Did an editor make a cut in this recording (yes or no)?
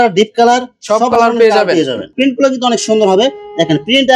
yes